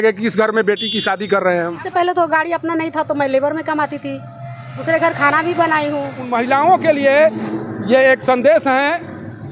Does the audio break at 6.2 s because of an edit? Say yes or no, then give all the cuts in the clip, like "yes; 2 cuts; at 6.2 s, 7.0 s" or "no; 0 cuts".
yes; 2 cuts; at 1.8 s, 6.2 s